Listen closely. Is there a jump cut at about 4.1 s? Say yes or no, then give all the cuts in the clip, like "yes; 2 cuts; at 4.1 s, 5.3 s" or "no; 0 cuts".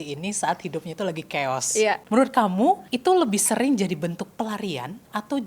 no; 2 cuts; at 2.0 s, 2.9 s